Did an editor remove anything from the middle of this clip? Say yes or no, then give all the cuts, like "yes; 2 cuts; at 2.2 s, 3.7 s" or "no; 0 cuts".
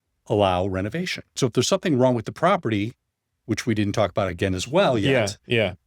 yes; 1 cut; at 1.4 s